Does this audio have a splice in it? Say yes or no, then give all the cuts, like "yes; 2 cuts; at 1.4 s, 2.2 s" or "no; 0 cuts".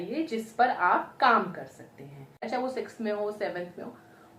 yes; 1 cut; at 2.5 s